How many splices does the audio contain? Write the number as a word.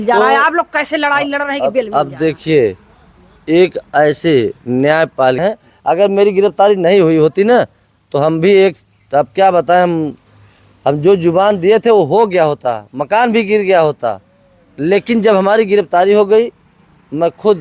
one